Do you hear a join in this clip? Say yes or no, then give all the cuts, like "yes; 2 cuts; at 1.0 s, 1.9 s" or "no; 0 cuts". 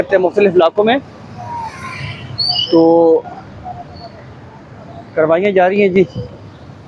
no; 0 cuts